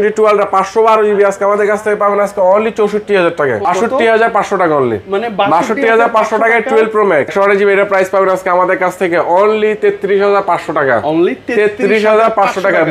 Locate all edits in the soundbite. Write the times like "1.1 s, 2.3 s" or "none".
3.6 s, 7.3 s